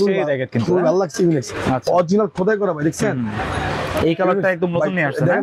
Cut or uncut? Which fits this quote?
uncut